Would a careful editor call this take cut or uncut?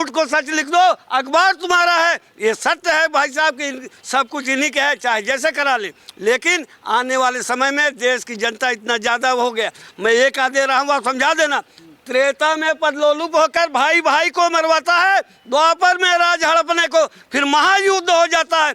uncut